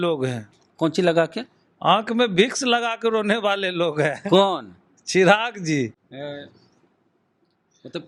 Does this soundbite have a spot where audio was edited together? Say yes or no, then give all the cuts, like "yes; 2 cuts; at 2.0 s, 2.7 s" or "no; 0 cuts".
no; 0 cuts